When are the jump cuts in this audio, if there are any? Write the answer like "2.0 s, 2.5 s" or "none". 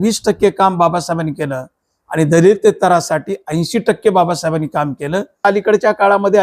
5.4 s